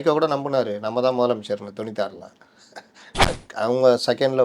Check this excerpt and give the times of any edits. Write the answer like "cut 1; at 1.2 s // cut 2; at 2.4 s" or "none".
cut 1; at 3.2 s